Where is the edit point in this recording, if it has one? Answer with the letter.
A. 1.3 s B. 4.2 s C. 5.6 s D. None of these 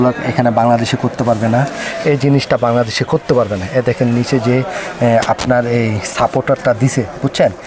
D